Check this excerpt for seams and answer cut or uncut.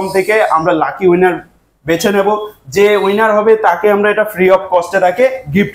uncut